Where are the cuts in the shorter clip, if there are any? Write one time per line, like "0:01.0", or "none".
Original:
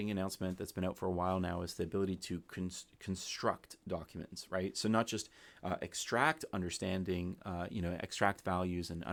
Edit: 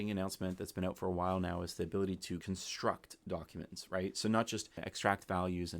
0:02.4
0:04.9